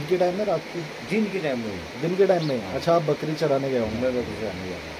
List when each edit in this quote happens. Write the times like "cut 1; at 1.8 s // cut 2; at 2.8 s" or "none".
none